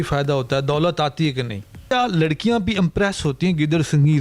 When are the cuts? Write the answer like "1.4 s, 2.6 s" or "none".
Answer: 1.9 s